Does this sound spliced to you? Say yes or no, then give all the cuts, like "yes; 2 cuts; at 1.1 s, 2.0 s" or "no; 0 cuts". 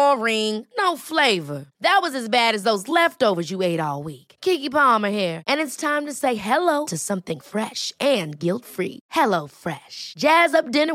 no; 0 cuts